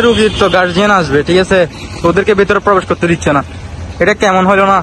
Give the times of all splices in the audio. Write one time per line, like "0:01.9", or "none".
none